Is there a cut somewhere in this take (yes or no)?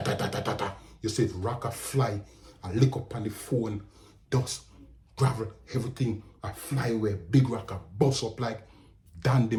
no